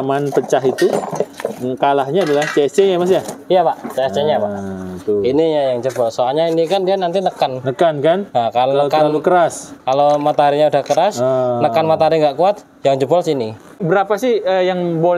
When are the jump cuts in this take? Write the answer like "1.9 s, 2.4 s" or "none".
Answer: 13.8 s